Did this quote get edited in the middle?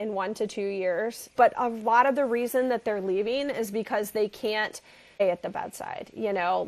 yes; 2 cuts; at 1.3 s, 5.2 s

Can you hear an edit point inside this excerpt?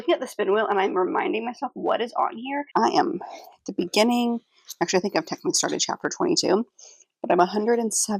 yes; 1 cut; at 2.7 s

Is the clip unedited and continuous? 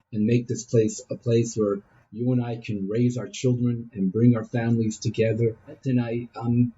no; 1 cut; at 5.8 s

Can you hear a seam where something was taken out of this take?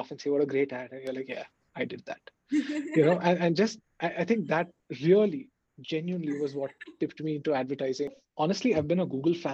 yes; 1 cut; at 8.2 s

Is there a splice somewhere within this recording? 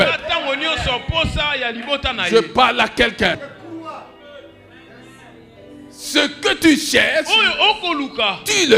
yes; 1 cut; at 3.4 s

